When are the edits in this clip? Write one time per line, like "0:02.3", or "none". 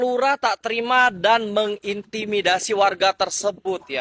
none

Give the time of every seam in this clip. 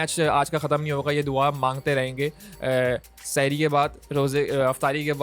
none

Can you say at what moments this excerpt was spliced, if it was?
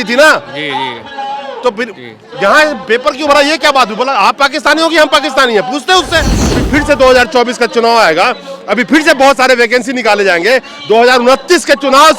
0:06.6

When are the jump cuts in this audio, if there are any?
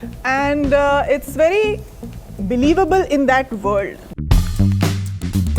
0:04.1

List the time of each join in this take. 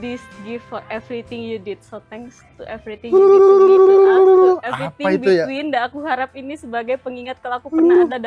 none

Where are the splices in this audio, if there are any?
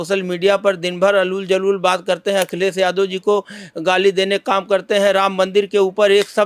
none

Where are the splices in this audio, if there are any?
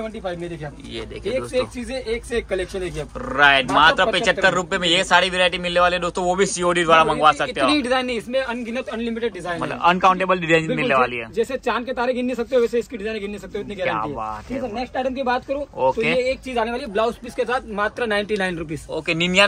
none

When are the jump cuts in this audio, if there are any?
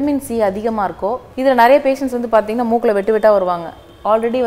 0:01.3

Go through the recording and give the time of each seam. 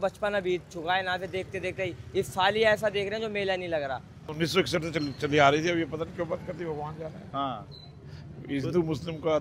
0:04.2

